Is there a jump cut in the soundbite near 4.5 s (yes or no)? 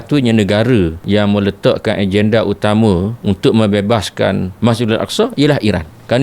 yes